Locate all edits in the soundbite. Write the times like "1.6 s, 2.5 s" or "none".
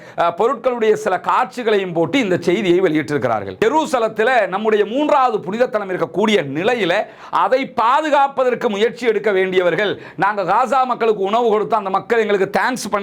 3.5 s